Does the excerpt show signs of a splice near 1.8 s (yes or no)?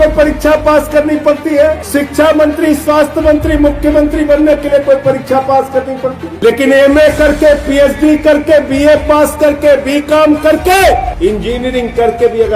yes